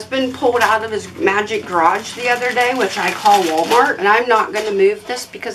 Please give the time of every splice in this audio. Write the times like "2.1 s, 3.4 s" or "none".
4.0 s